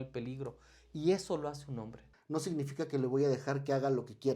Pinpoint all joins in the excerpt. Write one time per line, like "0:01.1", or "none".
0:02.1